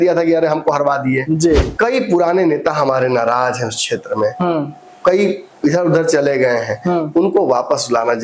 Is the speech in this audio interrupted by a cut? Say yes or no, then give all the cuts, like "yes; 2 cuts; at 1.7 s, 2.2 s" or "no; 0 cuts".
yes; 1 cut; at 1.7 s